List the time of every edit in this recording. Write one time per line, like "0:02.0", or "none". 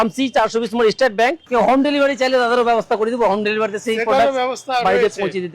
0:01.4